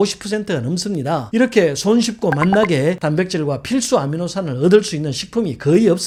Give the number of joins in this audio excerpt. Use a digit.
0